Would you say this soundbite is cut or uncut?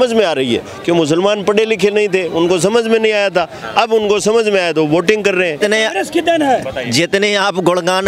cut